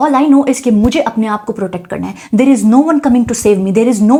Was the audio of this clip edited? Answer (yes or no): no